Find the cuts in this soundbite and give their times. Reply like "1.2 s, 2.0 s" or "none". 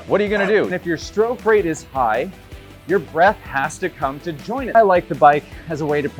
0.7 s, 4.7 s